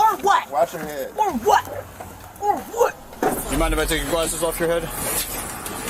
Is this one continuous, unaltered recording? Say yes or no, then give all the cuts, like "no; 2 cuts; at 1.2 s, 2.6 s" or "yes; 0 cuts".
no; 1 cut; at 3.4 s